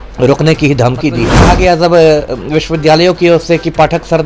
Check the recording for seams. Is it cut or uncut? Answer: cut